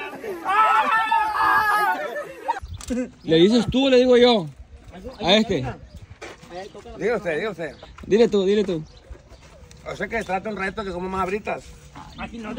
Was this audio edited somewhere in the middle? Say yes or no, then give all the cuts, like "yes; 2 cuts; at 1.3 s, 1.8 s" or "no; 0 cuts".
yes; 1 cut; at 2.7 s